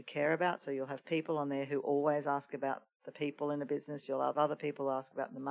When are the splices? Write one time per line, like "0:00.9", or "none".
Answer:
0:04.3